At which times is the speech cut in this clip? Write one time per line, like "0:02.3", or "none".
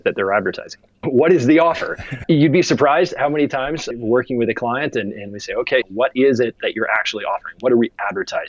0:01.0
0:02.1
0:03.9
0:05.9